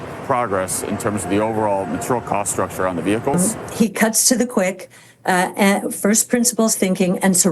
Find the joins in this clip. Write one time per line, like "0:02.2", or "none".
0:03.4